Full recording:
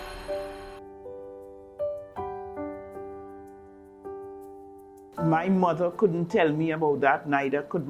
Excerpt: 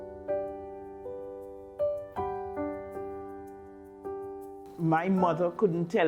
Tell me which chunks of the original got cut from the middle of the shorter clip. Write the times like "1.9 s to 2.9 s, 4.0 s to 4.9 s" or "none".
4.8 s to 5.2 s